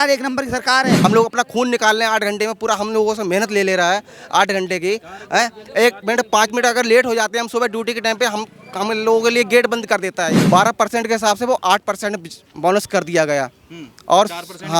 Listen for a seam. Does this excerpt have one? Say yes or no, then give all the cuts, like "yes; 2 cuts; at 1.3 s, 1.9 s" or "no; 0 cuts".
yes; 2 cuts; at 1.0 s, 10.4 s